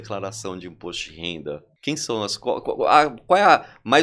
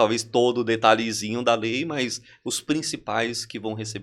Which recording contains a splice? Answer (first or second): first